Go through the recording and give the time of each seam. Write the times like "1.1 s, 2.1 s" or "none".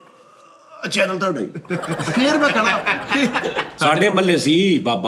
3.7 s